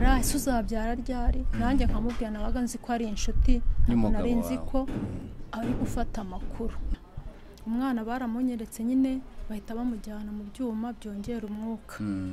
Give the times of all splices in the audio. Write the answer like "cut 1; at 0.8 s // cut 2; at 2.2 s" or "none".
cut 1; at 6.9 s